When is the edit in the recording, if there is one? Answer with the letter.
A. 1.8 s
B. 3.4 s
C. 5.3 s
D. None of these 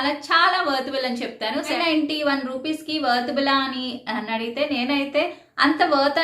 A